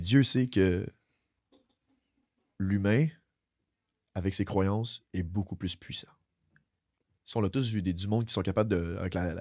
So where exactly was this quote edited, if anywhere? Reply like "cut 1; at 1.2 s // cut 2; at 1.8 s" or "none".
none